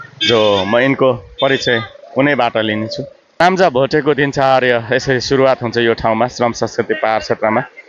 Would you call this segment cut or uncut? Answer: cut